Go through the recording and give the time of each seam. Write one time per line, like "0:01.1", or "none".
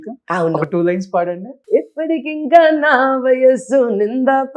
0:01.5